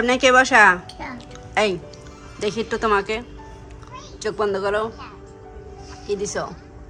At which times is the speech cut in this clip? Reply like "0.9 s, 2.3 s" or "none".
none